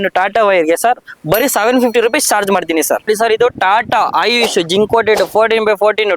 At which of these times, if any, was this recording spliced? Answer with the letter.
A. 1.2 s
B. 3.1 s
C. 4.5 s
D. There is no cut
B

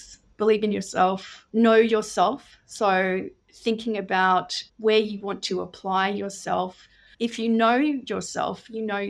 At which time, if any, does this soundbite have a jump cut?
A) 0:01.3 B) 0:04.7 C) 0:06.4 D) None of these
A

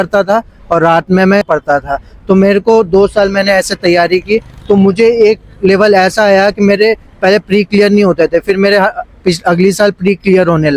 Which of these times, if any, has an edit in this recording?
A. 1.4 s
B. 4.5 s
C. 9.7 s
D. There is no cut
A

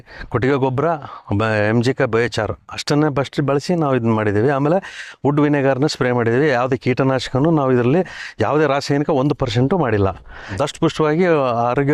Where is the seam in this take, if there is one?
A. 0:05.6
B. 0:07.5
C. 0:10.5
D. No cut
C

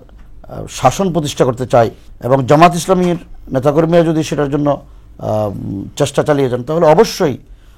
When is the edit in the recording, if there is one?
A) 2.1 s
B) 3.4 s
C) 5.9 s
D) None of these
A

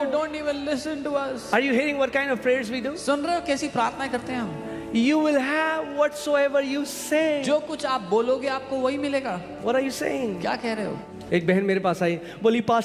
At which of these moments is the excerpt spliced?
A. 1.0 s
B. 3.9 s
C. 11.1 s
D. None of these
C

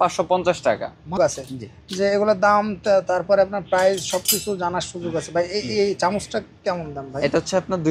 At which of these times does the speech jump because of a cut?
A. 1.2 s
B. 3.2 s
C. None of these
A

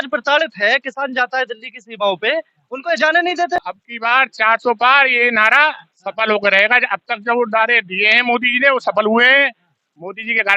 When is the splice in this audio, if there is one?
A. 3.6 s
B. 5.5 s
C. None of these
A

